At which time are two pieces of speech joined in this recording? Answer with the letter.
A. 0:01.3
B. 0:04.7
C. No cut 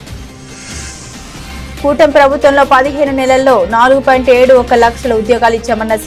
C